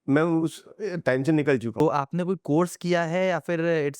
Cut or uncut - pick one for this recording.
cut